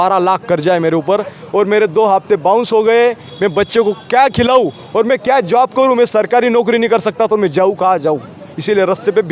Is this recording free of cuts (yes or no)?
yes